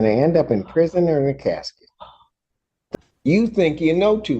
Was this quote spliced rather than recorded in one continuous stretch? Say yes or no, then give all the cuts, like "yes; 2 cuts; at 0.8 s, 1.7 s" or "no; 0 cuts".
yes; 1 cut; at 2.9 s